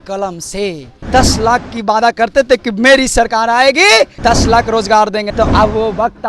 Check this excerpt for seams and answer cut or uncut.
cut